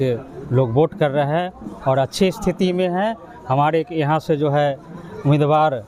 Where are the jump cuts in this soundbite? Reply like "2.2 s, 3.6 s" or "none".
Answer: none